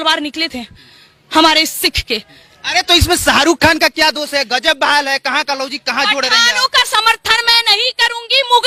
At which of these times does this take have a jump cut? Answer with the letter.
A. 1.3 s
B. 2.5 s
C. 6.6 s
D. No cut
D